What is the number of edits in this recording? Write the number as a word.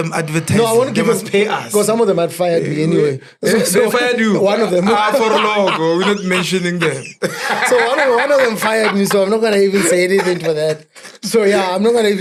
zero